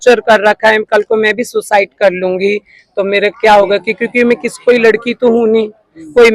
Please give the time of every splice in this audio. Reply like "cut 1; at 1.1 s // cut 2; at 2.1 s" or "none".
none